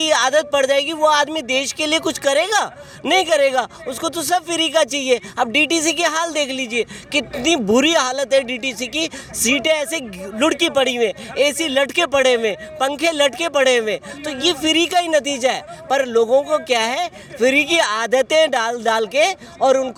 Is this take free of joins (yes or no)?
yes